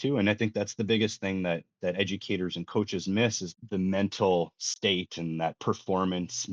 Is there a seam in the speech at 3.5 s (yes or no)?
yes